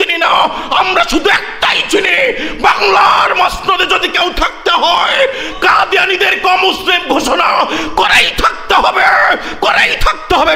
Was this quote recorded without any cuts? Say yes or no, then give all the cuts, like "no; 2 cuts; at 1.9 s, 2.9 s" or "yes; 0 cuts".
yes; 0 cuts